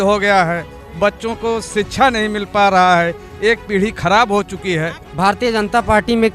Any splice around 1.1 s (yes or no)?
no